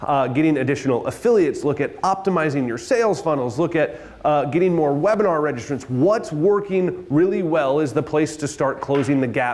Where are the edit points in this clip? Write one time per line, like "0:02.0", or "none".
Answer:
none